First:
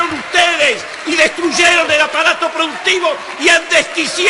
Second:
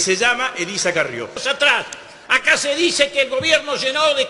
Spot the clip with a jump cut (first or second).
second